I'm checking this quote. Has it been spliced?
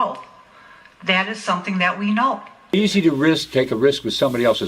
yes; 1 cut; at 2.8 s

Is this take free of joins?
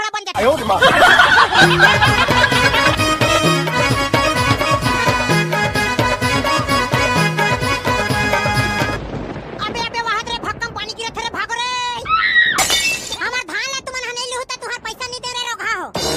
no; 1 cut; at 13.1 s

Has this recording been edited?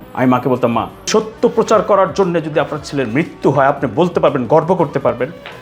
yes; 1 cut; at 1.1 s

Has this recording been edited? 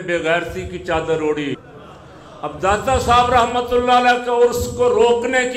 yes; 1 cut; at 1.6 s

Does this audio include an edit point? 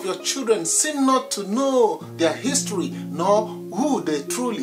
no; 0 cuts

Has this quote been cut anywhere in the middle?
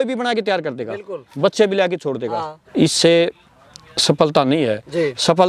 yes; 1 cut; at 2.6 s

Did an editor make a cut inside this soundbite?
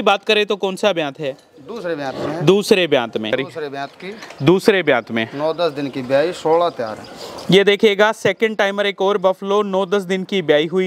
yes; 1 cut; at 3.4 s

